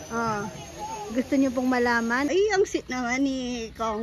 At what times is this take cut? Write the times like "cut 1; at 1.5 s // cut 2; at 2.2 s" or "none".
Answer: cut 1; at 2.3 s

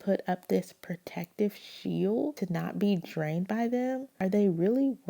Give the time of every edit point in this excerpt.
cut 1; at 2.4 s // cut 2; at 4.1 s

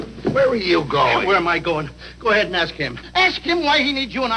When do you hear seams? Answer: none

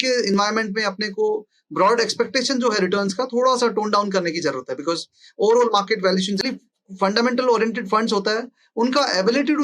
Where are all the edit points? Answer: cut 1; at 6.5 s

